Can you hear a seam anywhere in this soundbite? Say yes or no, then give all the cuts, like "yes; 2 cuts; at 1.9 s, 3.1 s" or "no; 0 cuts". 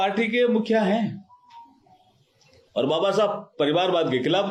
no; 0 cuts